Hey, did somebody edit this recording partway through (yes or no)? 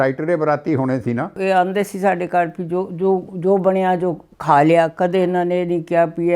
yes